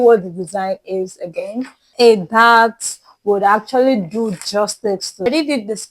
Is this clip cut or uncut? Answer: cut